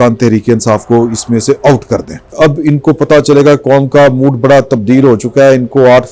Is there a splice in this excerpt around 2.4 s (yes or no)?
yes